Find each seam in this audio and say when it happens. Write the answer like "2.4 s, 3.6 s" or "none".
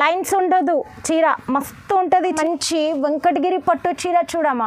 2.3 s